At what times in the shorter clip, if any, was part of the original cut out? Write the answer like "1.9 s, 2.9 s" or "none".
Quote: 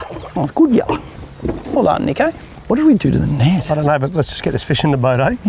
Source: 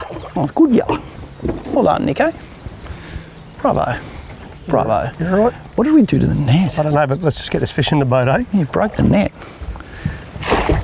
2.6 s